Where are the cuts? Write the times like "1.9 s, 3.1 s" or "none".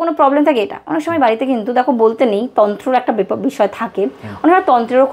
none